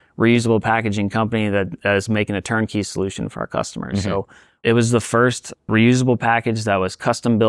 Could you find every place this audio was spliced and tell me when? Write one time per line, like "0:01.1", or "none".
0:04.6
0:05.6